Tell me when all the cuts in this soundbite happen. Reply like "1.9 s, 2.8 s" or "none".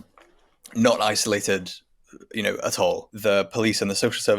3.1 s